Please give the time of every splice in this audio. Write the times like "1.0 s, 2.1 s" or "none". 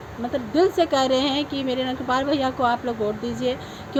none